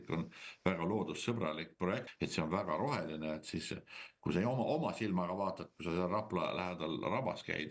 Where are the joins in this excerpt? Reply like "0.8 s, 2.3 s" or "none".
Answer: 2.1 s